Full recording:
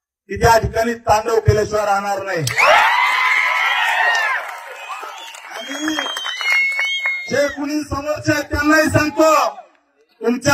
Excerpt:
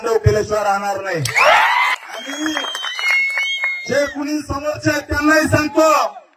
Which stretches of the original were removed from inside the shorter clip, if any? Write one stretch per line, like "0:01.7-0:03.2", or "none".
0:03.2-0:05.4